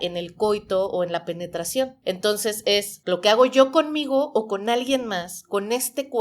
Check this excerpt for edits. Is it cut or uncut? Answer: cut